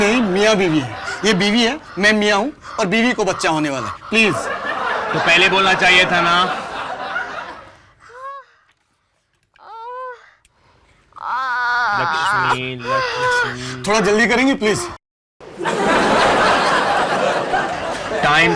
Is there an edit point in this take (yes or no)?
no